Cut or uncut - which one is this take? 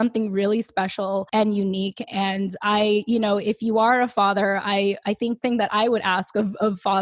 cut